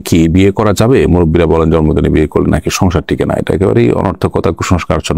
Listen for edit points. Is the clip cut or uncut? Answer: uncut